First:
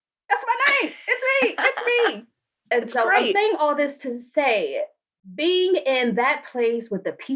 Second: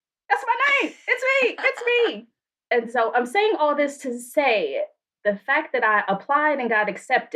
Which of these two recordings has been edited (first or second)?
second